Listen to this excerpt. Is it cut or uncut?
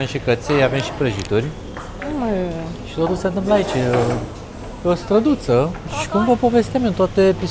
uncut